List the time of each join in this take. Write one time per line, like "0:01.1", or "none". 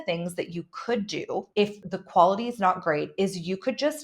0:01.8

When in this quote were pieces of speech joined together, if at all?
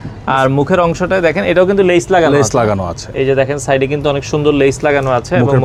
none

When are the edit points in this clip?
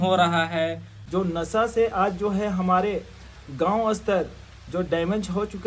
0:00.9

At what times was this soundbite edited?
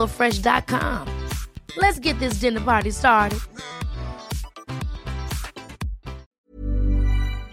0:06.3

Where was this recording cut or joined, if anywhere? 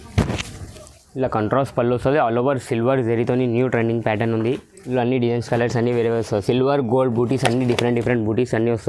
0:04.7

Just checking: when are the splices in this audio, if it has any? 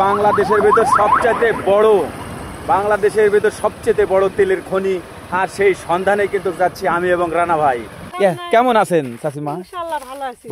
0:08.0

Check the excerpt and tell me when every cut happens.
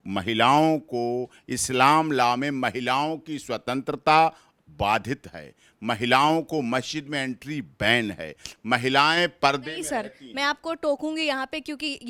none

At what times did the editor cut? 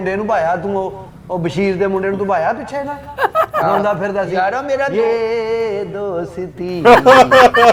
none

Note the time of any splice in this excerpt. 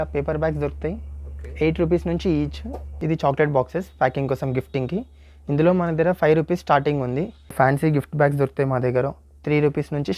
0:03.0
0:07.4

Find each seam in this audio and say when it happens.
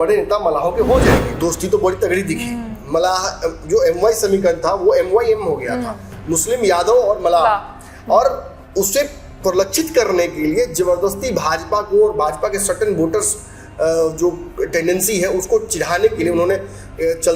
0:01.3

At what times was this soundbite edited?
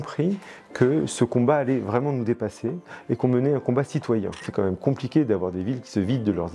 0:04.4

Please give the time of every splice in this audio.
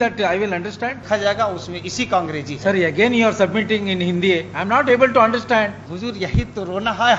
0:01.0
0:05.9

